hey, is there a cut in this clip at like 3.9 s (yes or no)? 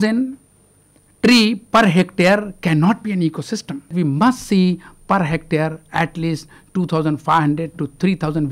yes